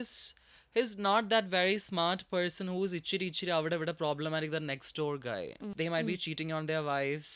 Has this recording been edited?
yes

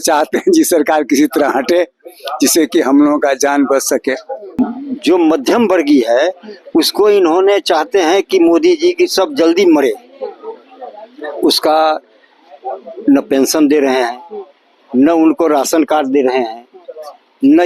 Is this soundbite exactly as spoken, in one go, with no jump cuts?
no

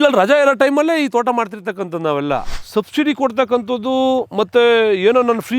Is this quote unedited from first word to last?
no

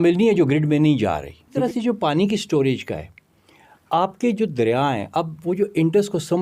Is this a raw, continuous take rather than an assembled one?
no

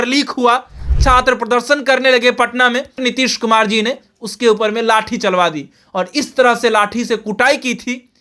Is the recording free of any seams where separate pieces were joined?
no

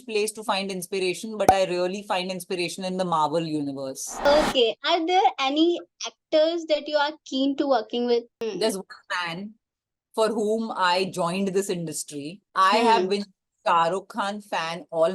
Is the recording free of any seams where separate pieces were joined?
no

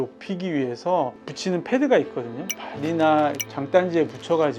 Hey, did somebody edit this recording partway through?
yes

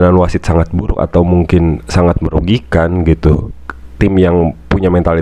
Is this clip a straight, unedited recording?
yes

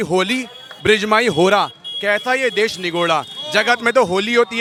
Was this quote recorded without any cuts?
yes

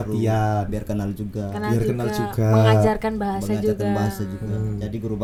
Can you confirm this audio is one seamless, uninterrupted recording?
yes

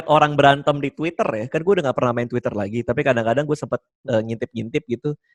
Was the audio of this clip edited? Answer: no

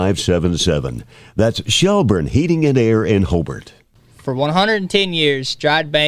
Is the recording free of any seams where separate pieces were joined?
no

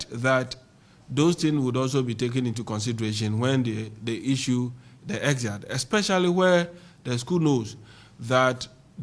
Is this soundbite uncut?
yes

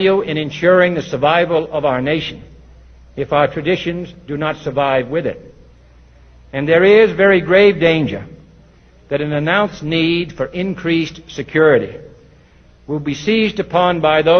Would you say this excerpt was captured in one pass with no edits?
no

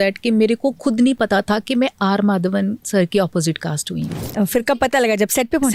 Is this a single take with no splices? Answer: yes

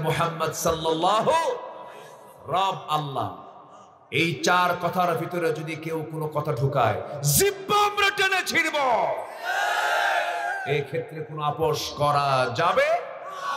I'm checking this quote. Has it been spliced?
no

